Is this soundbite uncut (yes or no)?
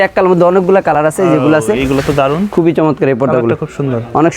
no